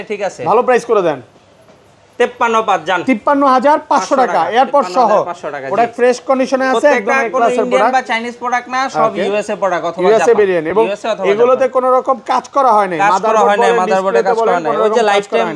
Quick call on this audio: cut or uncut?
uncut